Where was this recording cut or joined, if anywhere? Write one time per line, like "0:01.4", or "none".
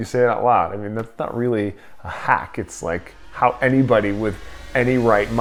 none